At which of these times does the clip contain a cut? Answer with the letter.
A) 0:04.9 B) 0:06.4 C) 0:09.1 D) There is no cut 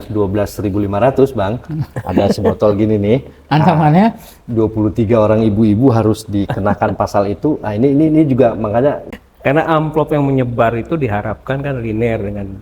C